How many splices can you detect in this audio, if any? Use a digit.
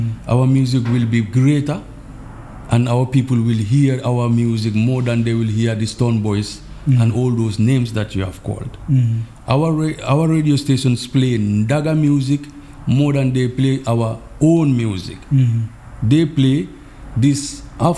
0